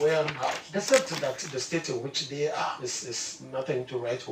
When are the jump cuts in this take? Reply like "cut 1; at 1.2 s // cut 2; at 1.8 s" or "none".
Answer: none

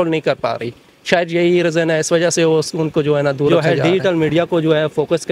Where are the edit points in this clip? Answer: cut 1; at 3.5 s

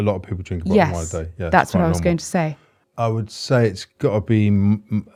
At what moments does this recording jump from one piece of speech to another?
none

